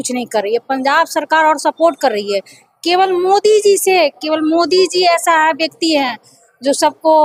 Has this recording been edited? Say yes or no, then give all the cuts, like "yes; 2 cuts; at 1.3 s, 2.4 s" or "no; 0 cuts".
no; 0 cuts